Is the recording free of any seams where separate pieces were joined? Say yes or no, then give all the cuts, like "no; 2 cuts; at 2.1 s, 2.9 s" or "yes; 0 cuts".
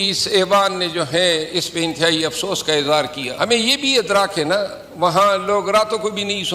no; 1 cut; at 3.2 s